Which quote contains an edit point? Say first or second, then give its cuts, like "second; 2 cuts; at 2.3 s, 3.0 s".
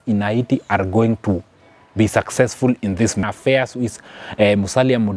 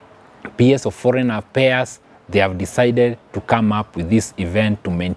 first; 1 cut; at 3.3 s